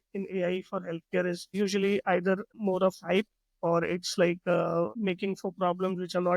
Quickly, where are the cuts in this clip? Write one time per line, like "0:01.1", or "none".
0:01.4
0:02.5
0:04.9